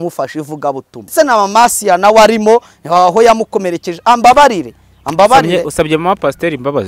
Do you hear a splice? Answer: yes; 1 cut; at 1.1 s

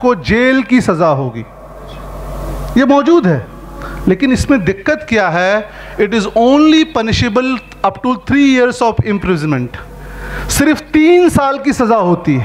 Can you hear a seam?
no; 0 cuts

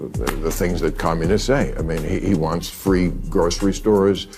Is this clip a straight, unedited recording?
yes; 0 cuts

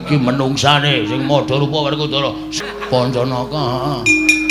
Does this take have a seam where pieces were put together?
yes; 1 cut; at 2.5 s

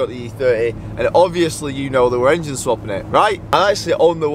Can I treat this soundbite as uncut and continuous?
no; 1 cut; at 3.4 s

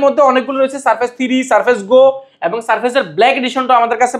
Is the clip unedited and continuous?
yes; 0 cuts

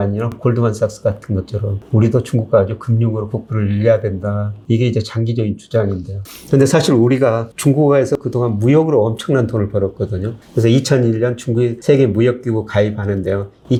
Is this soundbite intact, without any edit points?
yes; 0 cuts

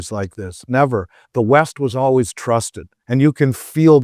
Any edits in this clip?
no; 0 cuts

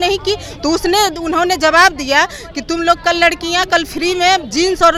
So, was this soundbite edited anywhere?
no; 0 cuts

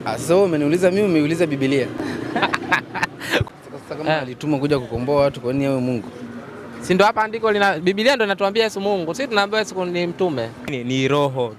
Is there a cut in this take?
yes; 2 cuts; at 3.4 s, 10.6 s

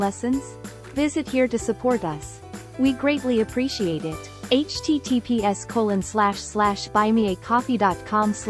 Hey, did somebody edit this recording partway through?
no; 0 cuts

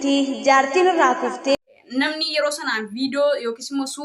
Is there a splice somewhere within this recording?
yes; 1 cut; at 1.5 s

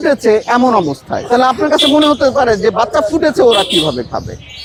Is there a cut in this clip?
no; 0 cuts

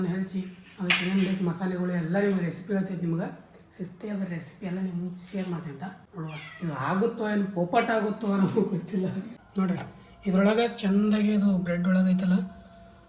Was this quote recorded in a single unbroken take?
no; 2 cuts; at 6.0 s, 9.6 s

